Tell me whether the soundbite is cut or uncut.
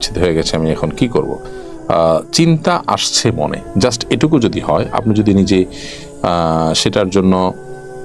uncut